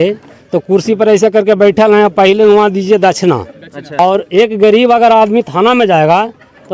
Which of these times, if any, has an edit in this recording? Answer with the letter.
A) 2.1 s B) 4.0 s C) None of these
B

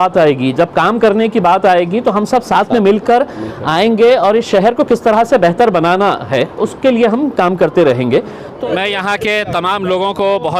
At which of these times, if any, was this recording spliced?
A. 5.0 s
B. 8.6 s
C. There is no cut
B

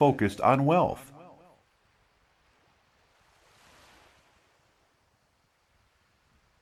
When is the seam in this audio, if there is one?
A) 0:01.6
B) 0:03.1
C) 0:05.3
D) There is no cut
A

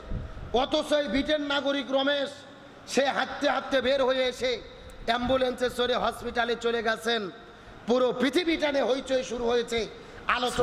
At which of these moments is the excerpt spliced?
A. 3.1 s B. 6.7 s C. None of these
C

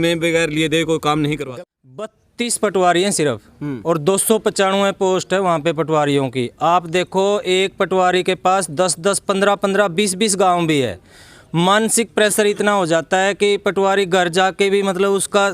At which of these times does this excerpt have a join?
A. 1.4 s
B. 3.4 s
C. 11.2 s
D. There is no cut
A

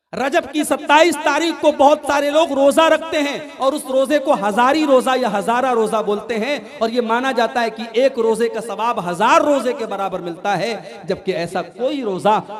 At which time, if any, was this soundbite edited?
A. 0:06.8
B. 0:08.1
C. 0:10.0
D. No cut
D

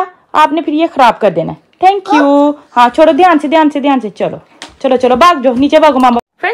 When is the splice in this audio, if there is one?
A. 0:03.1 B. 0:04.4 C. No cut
C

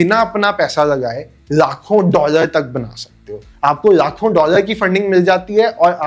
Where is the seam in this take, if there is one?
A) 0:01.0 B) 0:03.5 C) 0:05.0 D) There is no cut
D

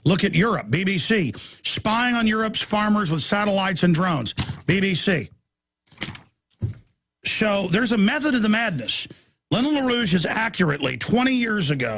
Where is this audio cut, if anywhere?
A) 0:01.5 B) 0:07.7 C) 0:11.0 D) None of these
C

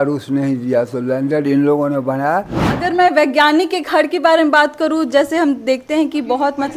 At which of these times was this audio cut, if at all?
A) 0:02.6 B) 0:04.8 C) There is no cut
A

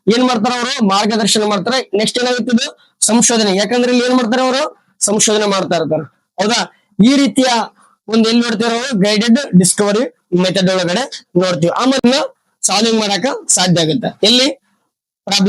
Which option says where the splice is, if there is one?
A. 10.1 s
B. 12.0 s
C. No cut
B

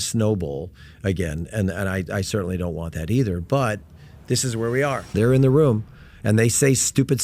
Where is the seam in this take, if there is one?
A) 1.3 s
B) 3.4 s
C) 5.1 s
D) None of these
C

